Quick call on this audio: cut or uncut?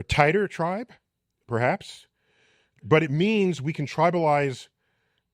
cut